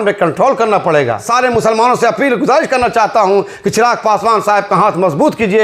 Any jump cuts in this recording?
yes; 1 cut; at 1.3 s

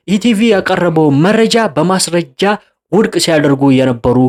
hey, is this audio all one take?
yes; 0 cuts

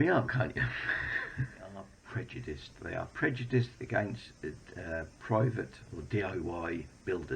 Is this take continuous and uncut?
no; 1 cut; at 2.0 s

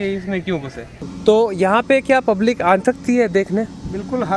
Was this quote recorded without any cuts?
no; 1 cut; at 1.0 s

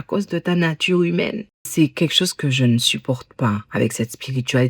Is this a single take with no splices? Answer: no; 1 cut; at 1.7 s

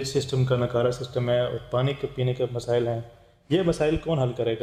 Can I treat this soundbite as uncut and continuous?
yes; 0 cuts

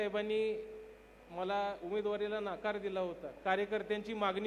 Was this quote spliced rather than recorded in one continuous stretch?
no; 0 cuts

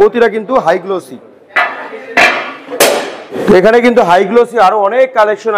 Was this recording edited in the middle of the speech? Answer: no; 0 cuts

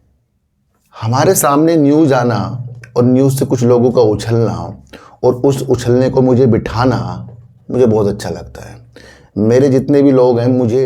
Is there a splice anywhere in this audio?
no; 0 cuts

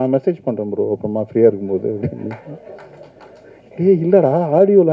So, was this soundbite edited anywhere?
no; 0 cuts

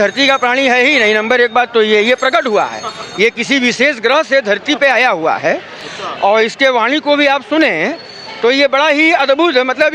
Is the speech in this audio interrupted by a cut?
no; 0 cuts

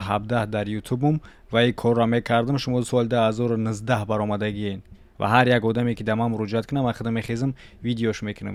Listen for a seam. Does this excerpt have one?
no; 0 cuts

